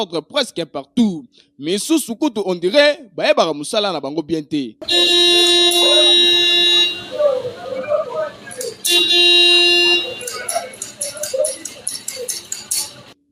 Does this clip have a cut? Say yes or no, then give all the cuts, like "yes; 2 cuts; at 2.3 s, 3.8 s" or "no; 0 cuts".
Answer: no; 0 cuts